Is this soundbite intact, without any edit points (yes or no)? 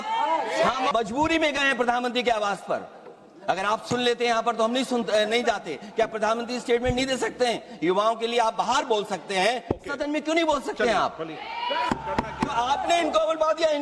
no